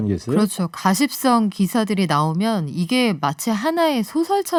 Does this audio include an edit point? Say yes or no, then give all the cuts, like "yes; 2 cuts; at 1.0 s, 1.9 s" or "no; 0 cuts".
no; 0 cuts